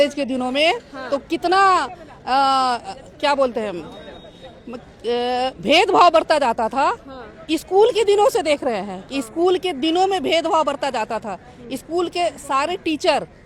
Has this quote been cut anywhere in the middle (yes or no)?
no